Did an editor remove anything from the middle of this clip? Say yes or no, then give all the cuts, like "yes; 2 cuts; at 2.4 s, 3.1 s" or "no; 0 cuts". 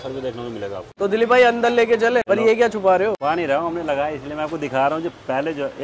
yes; 3 cuts; at 0.9 s, 2.2 s, 3.2 s